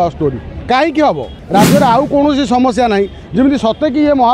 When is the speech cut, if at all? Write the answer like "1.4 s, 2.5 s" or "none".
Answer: 1.4 s